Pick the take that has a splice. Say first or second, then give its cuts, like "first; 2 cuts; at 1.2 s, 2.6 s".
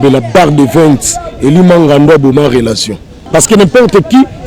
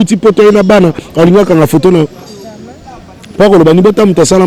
first; 1 cut; at 3.2 s